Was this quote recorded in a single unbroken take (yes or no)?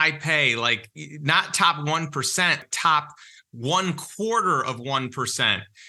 no